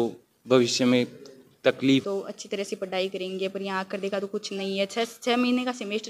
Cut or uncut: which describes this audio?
cut